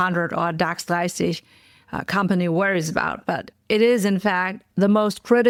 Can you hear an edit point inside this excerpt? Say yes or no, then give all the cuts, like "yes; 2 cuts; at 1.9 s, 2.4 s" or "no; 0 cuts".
no; 0 cuts